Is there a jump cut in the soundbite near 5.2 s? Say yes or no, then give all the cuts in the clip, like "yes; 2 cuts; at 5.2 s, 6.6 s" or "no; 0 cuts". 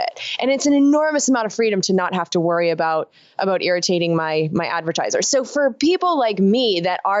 yes; 1 cut; at 5.2 s